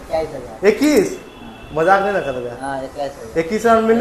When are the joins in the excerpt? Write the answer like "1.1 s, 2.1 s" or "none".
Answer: none